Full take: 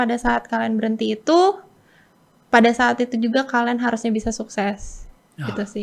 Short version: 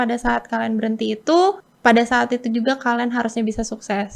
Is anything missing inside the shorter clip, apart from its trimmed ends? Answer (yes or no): yes